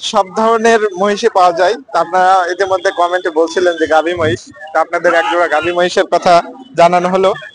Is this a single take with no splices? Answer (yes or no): yes